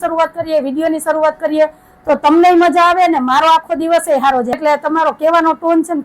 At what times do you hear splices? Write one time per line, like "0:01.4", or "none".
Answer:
0:04.6